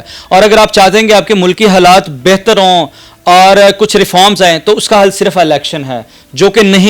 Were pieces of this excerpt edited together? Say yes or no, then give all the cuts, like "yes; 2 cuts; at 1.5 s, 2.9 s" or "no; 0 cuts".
no; 0 cuts